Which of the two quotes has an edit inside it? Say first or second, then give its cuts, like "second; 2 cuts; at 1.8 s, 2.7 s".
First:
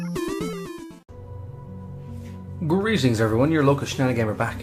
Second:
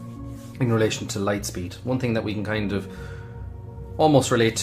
second; 1 cut; at 2.6 s